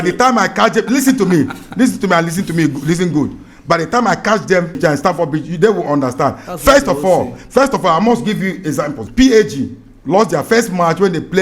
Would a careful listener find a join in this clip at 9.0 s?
yes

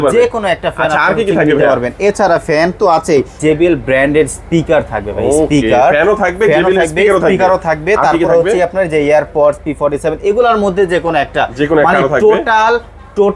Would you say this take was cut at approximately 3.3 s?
yes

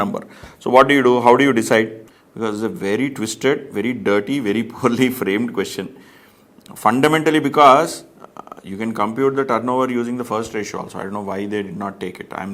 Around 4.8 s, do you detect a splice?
no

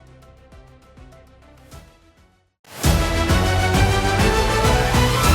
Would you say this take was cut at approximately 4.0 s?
no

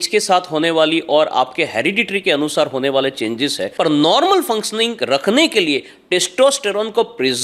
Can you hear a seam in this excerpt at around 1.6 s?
no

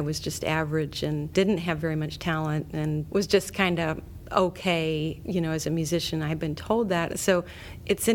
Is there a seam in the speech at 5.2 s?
yes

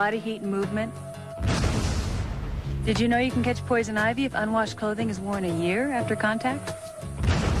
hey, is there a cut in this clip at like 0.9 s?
yes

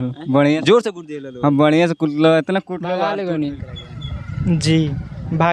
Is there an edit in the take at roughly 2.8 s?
yes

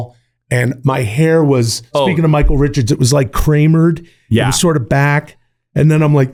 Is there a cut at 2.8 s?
no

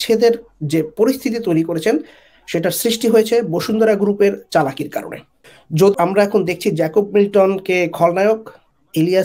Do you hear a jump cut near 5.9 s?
yes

